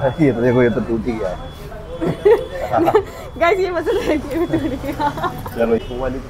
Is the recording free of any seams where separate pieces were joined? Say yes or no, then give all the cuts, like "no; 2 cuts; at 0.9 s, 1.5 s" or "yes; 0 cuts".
yes; 0 cuts